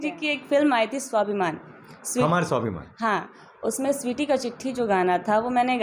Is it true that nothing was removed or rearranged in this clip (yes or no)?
yes